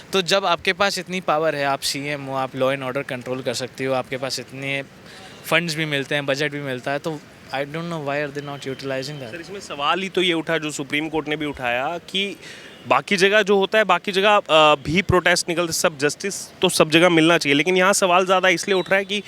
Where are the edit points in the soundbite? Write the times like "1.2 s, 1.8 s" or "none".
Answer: none